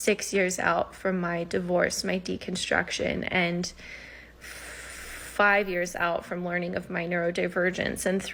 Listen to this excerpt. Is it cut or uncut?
uncut